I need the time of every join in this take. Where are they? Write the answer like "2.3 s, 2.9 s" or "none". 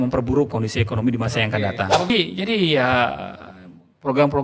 2.1 s